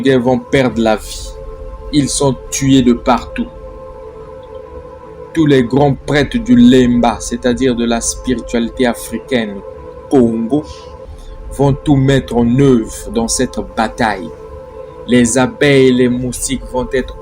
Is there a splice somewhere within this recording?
yes; 2 cuts; at 3.5 s, 5.1 s

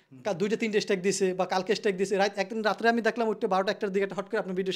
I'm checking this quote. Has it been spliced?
no; 0 cuts

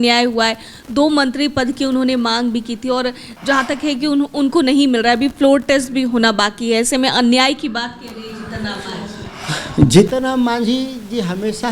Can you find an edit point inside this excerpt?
no; 0 cuts

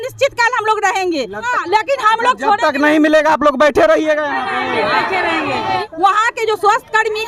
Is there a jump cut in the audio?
yes; 2 cuts; at 1.5 s, 5.8 s

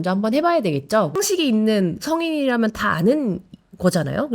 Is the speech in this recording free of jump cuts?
no; 1 cut; at 1.1 s

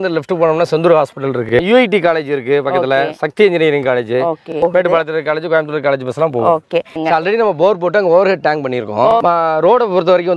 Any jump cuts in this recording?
yes; 4 cuts; at 1.5 s, 4.6 s, 7.0 s, 9.1 s

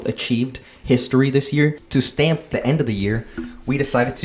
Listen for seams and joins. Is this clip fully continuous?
no; 1 cut; at 2.0 s

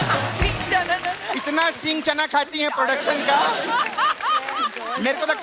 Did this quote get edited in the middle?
no; 0 cuts

